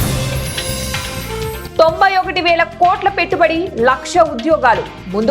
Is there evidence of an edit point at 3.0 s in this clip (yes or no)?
no